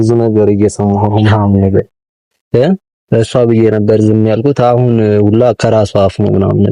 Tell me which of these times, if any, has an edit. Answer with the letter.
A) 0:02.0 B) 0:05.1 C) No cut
C